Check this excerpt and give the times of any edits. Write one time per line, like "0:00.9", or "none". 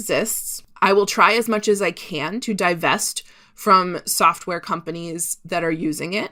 none